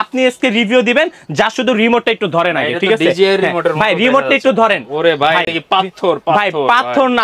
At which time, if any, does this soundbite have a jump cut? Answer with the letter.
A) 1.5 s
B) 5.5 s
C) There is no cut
C